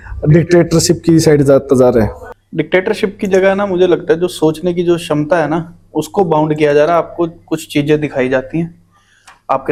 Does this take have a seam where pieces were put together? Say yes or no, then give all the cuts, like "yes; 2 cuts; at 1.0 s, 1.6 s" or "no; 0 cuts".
no; 0 cuts